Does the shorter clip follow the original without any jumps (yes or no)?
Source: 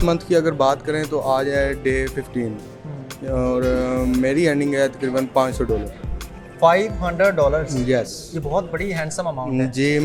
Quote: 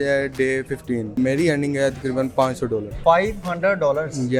no